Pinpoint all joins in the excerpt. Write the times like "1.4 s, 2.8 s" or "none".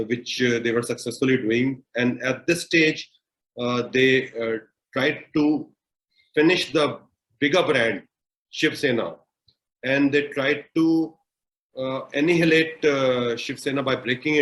none